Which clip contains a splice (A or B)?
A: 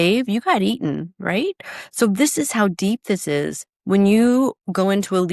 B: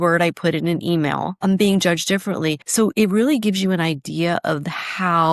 B